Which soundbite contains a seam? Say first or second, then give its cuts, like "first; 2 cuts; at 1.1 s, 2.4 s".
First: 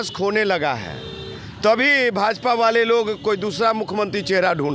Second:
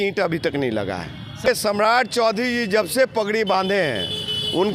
second; 1 cut; at 1.5 s